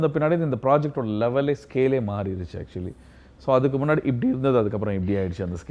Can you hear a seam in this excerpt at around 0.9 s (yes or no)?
no